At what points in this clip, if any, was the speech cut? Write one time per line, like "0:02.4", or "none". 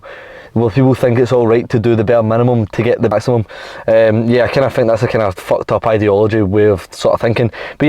0:03.1